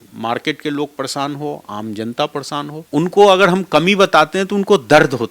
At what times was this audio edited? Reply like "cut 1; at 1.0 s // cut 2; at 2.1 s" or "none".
cut 1; at 2.8 s